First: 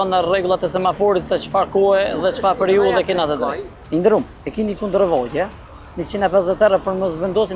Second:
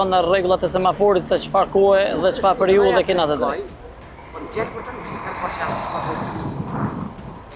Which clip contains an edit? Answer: first; 1 cut; at 3.7 s

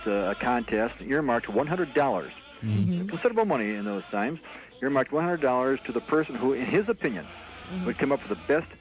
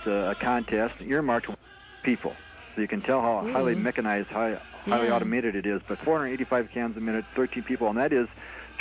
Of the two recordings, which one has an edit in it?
first; 1 cut; at 1.6 s

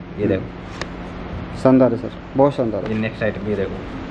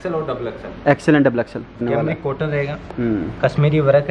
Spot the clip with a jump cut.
second; 1 cut; at 1.8 s

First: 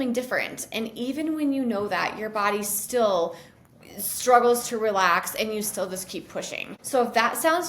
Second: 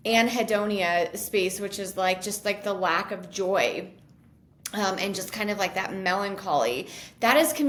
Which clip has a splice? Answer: first; 1 cut; at 6.7 s

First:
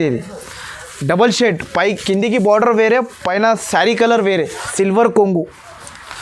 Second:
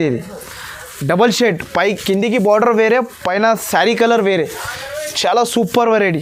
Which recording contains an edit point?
first; 1 cut; at 4.6 s

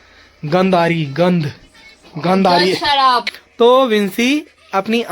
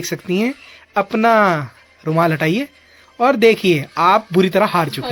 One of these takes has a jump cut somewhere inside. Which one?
first; 1 cut; at 3.4 s

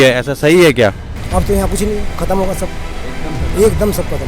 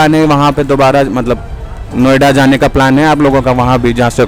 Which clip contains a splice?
first; 1 cut; at 1.1 s

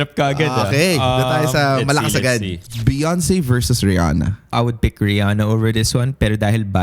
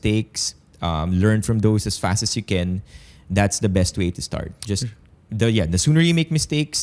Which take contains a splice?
first; 2 cuts; at 2.7 s, 4.5 s

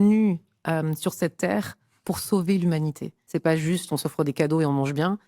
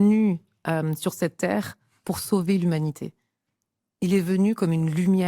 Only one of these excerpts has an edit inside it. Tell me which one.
first; 1 cut; at 3.2 s

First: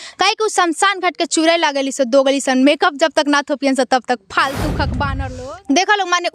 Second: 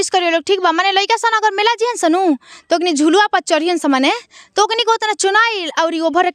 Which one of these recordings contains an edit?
first; 1 cut; at 5.2 s

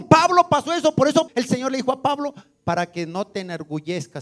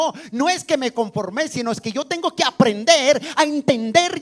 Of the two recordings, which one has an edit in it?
first; 1 cut; at 1.3 s

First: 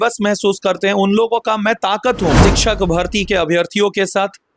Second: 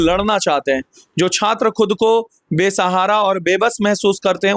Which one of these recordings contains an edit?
first; 1 cut; at 2.4 s

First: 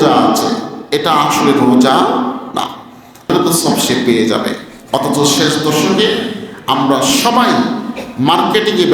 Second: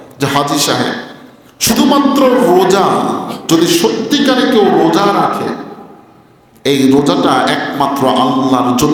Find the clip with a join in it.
first; 1 cut; at 3.3 s

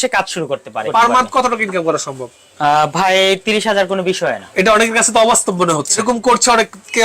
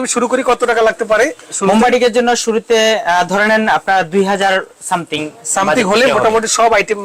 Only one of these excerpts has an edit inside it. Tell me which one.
first; 3 cuts; at 0.9 s, 4.4 s, 6.0 s

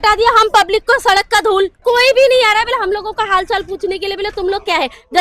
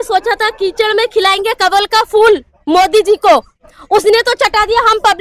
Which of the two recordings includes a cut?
first; 1 cut; at 1.8 s

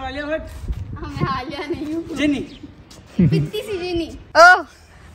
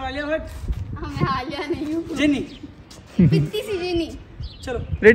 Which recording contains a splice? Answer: first; 1 cut; at 4.2 s

